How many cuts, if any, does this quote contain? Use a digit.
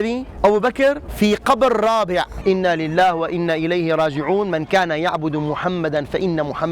1